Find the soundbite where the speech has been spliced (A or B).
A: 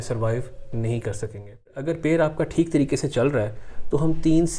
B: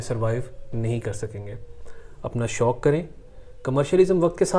A